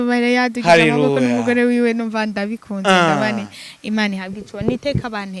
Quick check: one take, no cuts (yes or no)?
yes